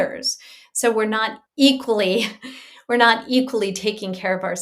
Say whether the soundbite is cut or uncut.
cut